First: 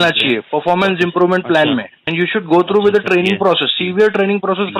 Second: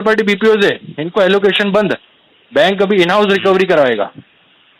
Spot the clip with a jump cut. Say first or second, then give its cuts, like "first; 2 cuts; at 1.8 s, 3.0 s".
first; 1 cut; at 2.0 s